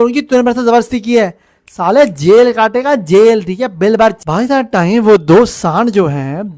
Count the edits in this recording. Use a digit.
1